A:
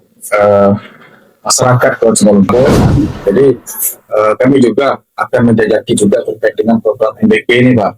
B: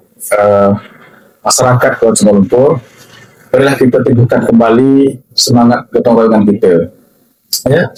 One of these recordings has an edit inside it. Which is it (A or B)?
A